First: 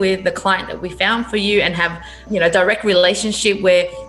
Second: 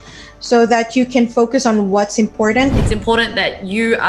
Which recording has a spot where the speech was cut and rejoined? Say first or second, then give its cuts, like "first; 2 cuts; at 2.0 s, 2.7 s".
second; 1 cut; at 2.8 s